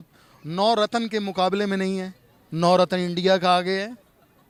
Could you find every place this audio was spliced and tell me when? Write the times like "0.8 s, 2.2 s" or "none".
none